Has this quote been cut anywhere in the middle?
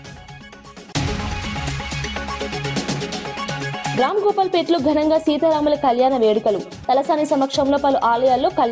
yes; 2 cuts; at 0.9 s, 3.9 s

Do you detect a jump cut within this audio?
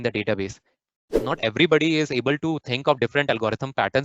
yes; 1 cut; at 1.2 s

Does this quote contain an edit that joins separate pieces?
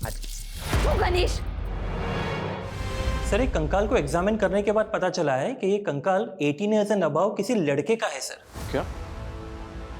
yes; 1 cut; at 2.8 s

